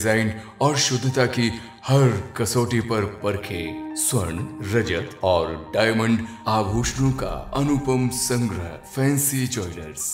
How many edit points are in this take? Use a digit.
0